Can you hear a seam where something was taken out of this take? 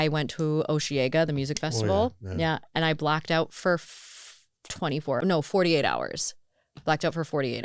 yes; 1 cut; at 5.2 s

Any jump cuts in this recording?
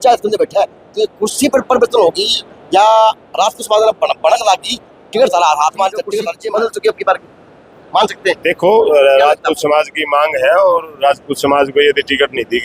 yes; 1 cut; at 6.3 s

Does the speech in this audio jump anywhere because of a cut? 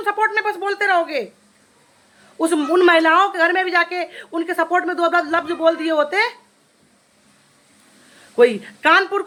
no; 0 cuts

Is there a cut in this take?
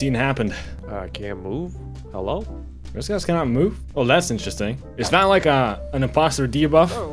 no; 0 cuts

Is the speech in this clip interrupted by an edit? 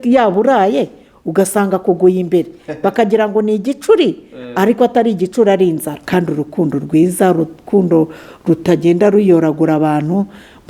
yes; 1 cut; at 5.9 s

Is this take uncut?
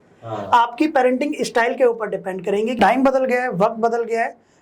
no; 1 cut; at 2.8 s

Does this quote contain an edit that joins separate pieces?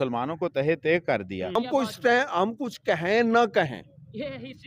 yes; 1 cut; at 1.5 s

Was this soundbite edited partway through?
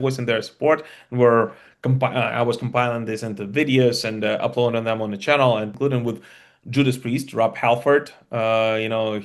yes; 1 cut; at 5.7 s

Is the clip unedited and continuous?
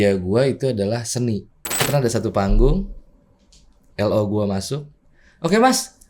no; 1 cut; at 1.9 s

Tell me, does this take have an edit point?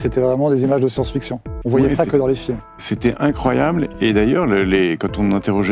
no; 0 cuts

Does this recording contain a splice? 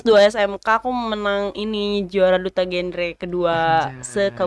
no; 0 cuts

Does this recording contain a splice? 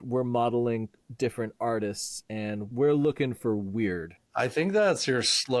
yes; 3 cuts; at 1.0 s, 2.6 s, 4.3 s

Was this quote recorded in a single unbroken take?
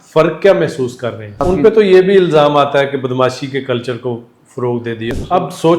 no; 2 cuts; at 1.4 s, 5.1 s

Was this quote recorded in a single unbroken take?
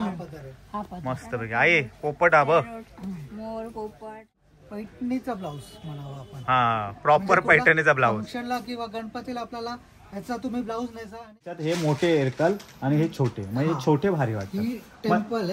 no; 2 cuts; at 4.5 s, 11.6 s

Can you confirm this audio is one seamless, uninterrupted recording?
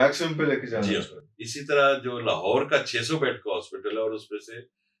yes; 0 cuts

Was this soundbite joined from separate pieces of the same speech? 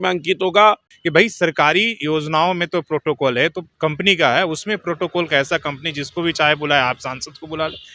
yes; 2 cuts; at 0.9 s, 3.7 s

